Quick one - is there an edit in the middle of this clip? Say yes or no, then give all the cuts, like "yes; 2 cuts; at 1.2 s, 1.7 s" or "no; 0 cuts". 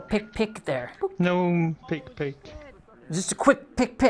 yes; 1 cut; at 0.9 s